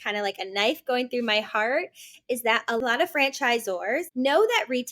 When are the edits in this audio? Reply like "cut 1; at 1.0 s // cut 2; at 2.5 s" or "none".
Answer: cut 1; at 2.8 s // cut 2; at 4.1 s